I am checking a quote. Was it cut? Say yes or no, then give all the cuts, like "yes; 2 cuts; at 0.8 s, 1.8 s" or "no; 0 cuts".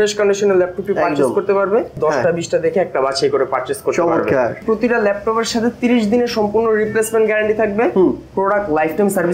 yes; 2 cuts; at 2.0 s, 4.6 s